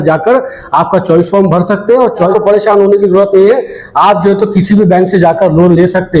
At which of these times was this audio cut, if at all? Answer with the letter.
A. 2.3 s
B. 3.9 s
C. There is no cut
A